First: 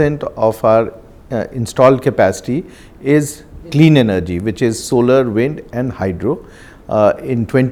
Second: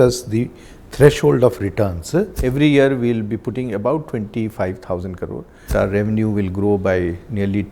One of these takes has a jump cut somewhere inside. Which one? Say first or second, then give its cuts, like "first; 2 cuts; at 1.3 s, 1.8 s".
second; 2 cuts; at 2.4 s, 5.7 s